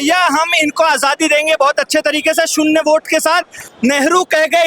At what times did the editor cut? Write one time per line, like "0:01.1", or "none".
0:03.7